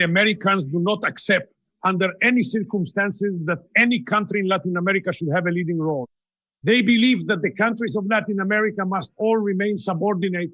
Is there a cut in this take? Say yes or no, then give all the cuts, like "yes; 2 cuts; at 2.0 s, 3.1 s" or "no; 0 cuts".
no; 0 cuts